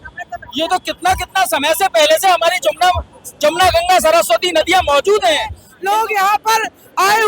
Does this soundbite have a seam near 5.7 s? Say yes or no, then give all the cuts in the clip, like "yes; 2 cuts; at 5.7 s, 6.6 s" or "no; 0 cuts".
yes; 1 cut; at 5.7 s